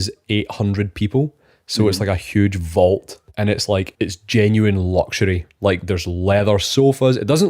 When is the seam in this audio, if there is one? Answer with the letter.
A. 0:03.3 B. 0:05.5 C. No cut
A